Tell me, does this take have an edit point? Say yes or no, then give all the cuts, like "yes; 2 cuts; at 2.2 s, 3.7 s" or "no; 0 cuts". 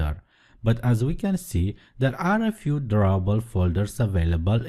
no; 0 cuts